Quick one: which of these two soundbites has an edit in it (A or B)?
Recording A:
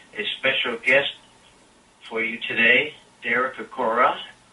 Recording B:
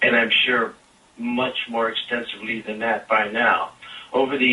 B